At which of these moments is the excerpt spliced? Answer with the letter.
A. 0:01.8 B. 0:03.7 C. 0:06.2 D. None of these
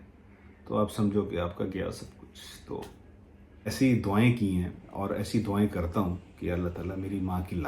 B